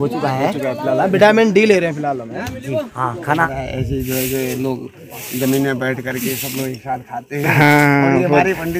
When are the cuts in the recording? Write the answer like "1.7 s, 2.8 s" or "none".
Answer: 3.5 s